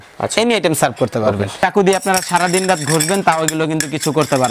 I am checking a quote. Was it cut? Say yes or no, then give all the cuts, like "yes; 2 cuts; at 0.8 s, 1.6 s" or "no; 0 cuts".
yes; 1 cut; at 1.6 s